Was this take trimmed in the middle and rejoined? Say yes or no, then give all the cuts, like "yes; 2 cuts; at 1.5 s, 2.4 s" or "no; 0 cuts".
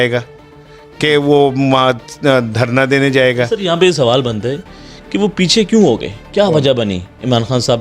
no; 0 cuts